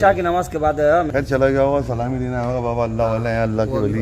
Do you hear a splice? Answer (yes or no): yes